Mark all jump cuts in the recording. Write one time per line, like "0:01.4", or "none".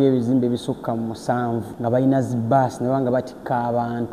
0:01.7